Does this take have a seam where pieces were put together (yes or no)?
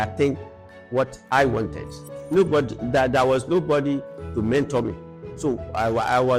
yes